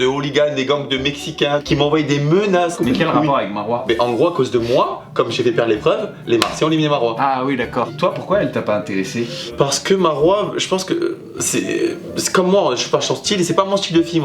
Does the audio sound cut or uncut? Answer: uncut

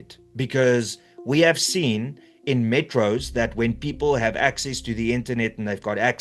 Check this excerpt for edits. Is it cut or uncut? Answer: uncut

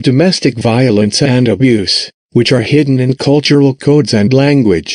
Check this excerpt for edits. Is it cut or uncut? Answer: uncut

